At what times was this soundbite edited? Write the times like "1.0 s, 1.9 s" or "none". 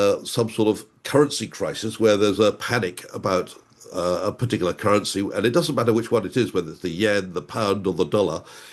none